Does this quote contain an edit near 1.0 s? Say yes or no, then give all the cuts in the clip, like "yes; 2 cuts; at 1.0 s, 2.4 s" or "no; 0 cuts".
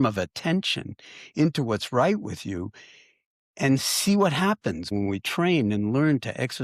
no; 1 cut; at 4.9 s